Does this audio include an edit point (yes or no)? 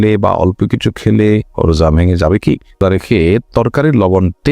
yes